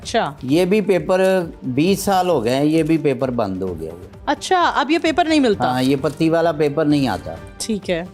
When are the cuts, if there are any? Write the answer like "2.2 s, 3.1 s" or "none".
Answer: none